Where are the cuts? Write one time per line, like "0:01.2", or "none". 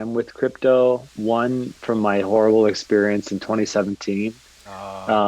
0:01.1